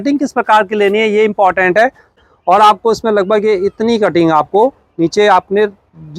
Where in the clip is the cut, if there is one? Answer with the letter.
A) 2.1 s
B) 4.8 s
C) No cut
A